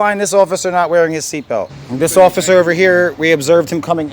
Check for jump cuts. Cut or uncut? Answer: cut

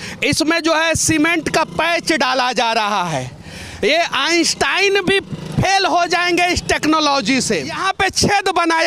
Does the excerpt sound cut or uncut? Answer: cut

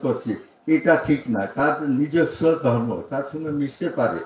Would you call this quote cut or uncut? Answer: uncut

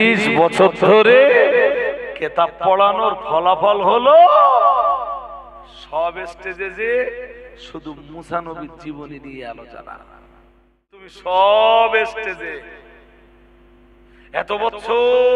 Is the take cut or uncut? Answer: cut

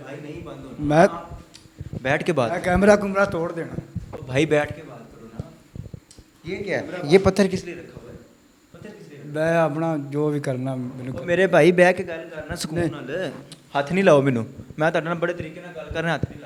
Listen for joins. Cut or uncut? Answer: uncut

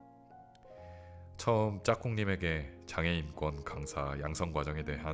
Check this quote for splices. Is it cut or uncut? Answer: cut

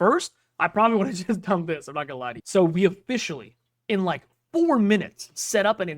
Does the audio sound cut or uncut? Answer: cut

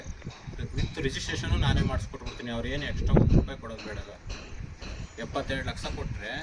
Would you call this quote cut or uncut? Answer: uncut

